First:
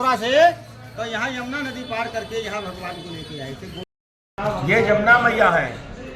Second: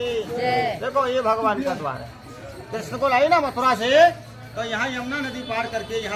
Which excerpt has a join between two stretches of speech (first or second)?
first